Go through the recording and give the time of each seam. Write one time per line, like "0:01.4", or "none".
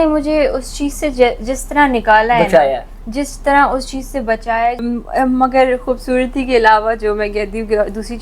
0:04.9